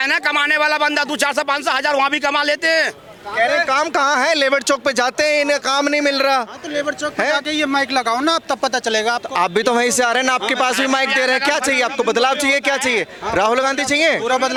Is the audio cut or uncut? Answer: uncut